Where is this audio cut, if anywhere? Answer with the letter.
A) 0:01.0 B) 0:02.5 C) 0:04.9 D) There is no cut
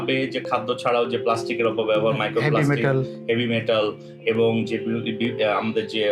D